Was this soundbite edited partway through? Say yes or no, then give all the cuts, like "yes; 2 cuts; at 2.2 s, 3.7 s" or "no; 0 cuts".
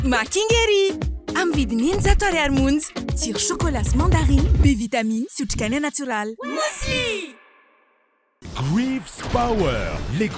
no; 0 cuts